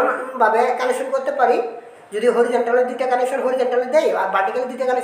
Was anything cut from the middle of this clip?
no; 0 cuts

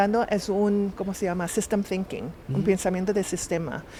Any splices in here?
no; 0 cuts

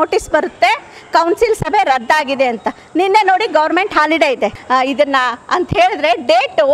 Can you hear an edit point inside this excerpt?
yes; 1 cut; at 4.6 s

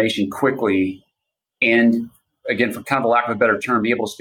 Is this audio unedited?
yes; 0 cuts

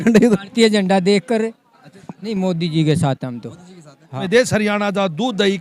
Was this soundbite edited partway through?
yes; 2 cuts; at 2.3 s, 4.2 s

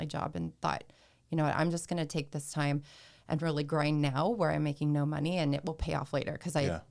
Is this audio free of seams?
yes; 0 cuts

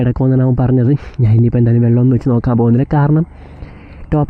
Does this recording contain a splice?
no; 0 cuts

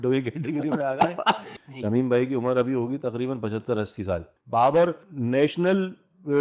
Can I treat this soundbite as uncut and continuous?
no; 2 cuts; at 1.5 s, 4.3 s

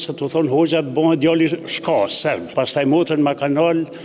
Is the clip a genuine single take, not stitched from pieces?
no; 1 cut; at 2.4 s

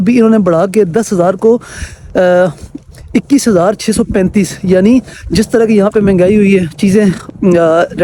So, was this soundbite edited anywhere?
no; 0 cuts

